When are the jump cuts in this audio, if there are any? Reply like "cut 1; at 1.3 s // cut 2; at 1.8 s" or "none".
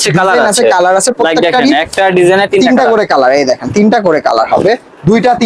none